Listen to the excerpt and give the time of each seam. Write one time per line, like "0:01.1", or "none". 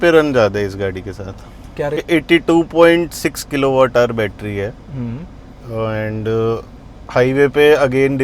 0:02.0